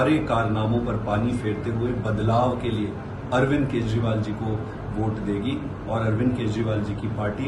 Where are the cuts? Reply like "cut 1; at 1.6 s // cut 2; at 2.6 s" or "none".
none